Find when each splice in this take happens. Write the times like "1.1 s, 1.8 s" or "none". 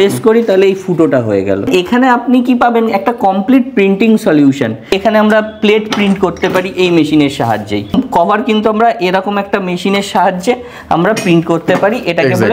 1.7 s, 4.9 s, 7.9 s